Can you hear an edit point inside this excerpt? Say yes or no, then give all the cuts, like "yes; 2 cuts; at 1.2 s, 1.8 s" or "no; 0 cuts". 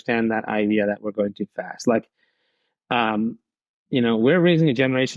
no; 0 cuts